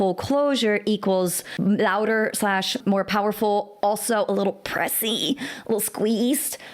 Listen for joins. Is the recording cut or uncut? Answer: cut